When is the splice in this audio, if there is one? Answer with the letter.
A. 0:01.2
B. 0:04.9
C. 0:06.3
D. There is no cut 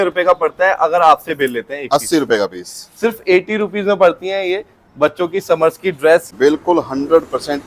C